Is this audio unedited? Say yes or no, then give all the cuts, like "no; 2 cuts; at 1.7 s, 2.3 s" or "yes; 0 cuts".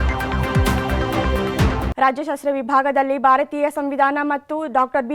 no; 1 cut; at 1.9 s